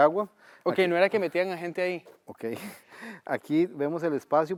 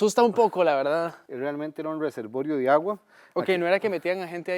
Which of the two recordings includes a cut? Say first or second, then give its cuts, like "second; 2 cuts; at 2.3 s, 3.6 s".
second; 1 cut; at 1.2 s